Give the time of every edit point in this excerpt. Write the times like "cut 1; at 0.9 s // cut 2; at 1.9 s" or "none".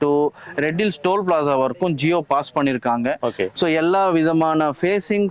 cut 1; at 3.5 s